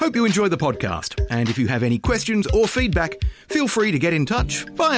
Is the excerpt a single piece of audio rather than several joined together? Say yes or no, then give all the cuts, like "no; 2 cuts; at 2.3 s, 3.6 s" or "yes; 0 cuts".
yes; 0 cuts